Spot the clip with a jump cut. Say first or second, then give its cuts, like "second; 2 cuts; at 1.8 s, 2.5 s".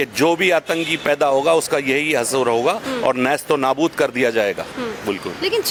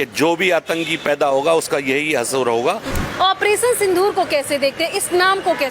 second; 1 cut; at 2.9 s